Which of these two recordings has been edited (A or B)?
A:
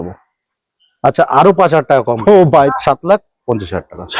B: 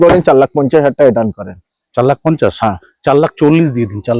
A